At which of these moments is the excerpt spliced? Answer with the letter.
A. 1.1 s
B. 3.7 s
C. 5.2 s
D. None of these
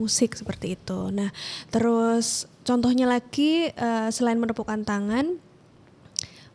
D